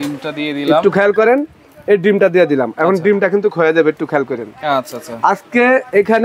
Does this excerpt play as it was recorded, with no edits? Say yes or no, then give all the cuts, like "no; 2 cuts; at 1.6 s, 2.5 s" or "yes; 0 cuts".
yes; 0 cuts